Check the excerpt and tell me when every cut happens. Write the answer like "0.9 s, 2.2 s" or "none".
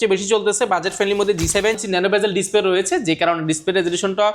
1.8 s

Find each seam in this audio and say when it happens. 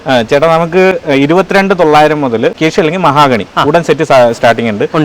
2.6 s

